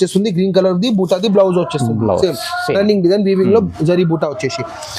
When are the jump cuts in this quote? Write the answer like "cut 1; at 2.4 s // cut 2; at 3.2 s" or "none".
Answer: none